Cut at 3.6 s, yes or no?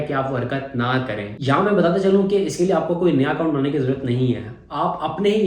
no